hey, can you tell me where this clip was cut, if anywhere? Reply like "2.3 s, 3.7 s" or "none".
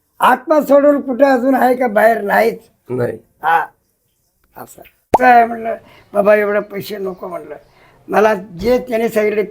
5.0 s